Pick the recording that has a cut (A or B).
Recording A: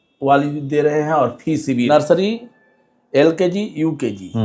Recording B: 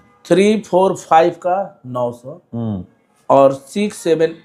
A